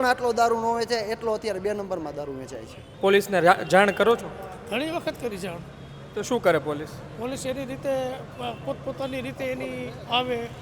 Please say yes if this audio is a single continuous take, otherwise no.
no